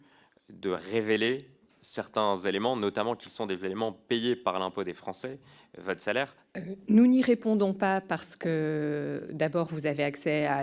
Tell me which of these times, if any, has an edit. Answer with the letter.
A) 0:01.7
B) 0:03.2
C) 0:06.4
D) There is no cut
C